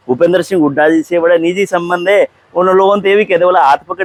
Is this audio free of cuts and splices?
yes; 0 cuts

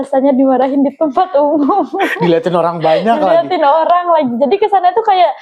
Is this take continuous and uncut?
yes; 0 cuts

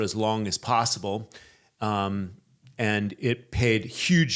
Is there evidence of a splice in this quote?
no; 0 cuts

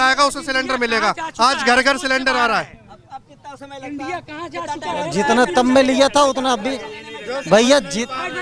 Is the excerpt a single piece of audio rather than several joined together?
yes; 0 cuts

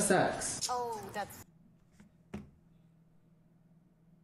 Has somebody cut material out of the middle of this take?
no; 0 cuts

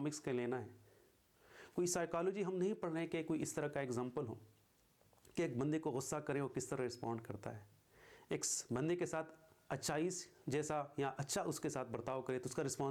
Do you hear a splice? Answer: no; 0 cuts

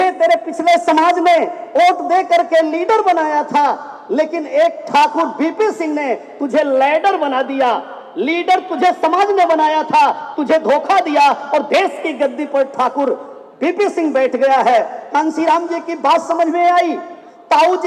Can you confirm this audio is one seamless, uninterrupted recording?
yes; 0 cuts

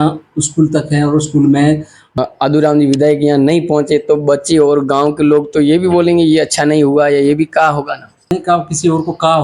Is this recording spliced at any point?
yes; 2 cuts; at 2.2 s, 8.3 s

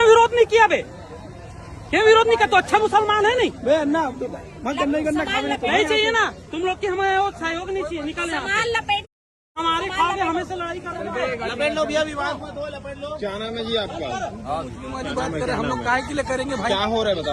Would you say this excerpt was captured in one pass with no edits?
yes; 0 cuts

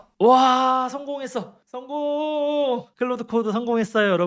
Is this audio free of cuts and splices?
yes; 0 cuts

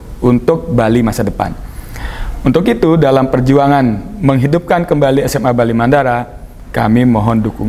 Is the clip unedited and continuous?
yes; 0 cuts

